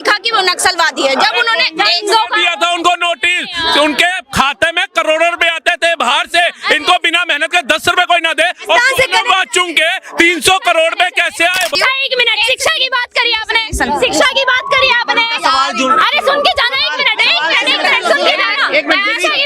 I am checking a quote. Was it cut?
yes; 1 cut; at 11.7 s

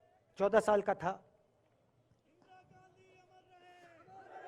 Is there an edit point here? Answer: no; 0 cuts

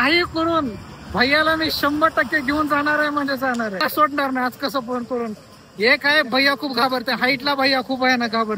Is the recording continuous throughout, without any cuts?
no; 1 cut; at 3.8 s

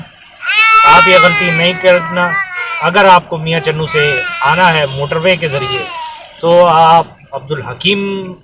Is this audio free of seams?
yes; 0 cuts

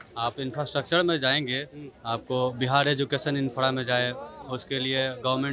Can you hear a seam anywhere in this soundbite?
no; 0 cuts

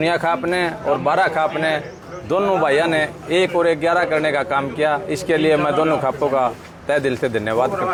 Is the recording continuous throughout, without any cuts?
yes; 0 cuts

